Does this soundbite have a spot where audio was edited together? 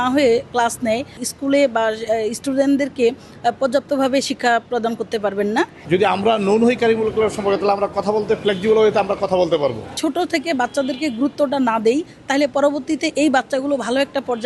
yes; 3 cuts; at 1.2 s, 5.8 s, 9.9 s

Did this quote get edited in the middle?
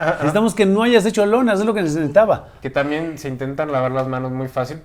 no; 0 cuts

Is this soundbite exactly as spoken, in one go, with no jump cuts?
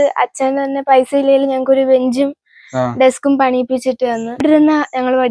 no; 1 cut; at 4.4 s

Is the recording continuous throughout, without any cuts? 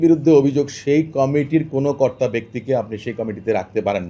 yes; 0 cuts

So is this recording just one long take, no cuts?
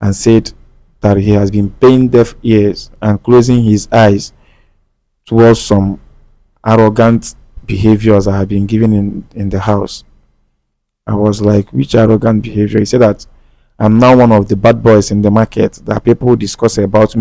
yes; 0 cuts

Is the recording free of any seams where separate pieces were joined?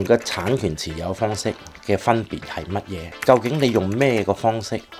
yes; 0 cuts

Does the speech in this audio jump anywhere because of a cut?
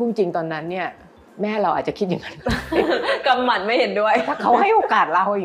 no; 0 cuts

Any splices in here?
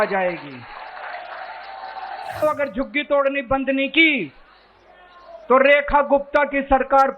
yes; 1 cut; at 2.4 s

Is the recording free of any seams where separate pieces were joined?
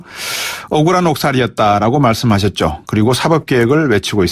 yes; 0 cuts

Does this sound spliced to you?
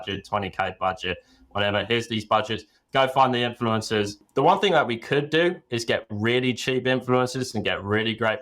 yes; 1 cut; at 4.2 s

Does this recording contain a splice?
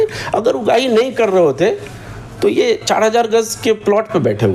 no; 0 cuts

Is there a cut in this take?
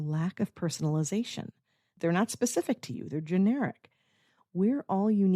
yes; 1 cut; at 1.8 s

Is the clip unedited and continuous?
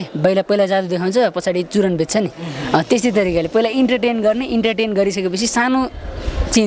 yes; 0 cuts

